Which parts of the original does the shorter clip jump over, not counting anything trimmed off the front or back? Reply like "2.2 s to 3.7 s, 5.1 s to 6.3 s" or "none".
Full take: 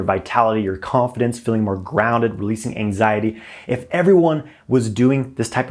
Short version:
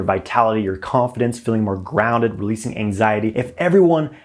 3.3 s to 3.7 s

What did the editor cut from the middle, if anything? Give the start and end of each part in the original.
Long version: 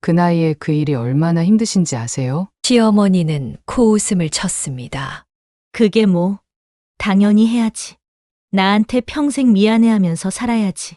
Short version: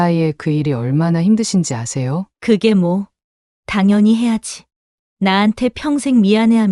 2.5 s to 5.6 s

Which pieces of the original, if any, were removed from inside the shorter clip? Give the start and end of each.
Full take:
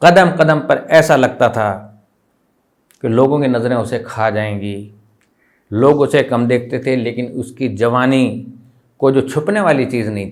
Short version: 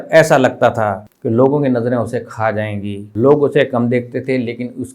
1.9 s to 2.9 s, 4.8 s to 5.6 s

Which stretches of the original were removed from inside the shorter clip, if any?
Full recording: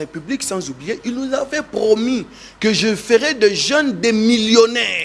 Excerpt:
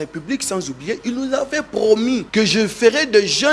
2.3 s to 2.5 s

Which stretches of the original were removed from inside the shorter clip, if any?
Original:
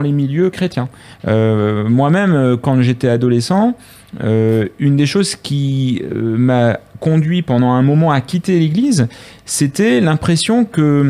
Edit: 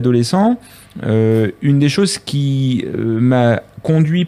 none

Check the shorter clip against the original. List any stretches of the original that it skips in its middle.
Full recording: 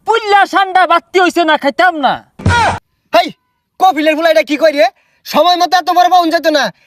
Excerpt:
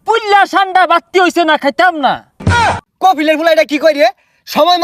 2.5 s to 3.3 s

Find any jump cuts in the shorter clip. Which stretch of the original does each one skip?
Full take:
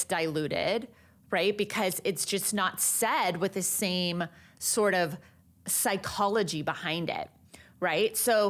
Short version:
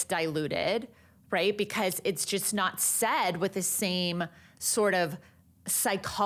none

